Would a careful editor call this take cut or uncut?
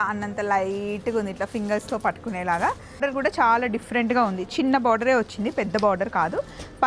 cut